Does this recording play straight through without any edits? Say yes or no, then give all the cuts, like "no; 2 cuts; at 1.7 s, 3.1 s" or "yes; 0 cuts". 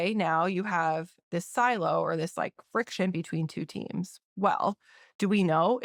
yes; 0 cuts